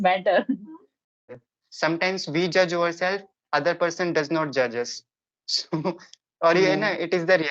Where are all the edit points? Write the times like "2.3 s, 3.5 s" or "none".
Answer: 1.4 s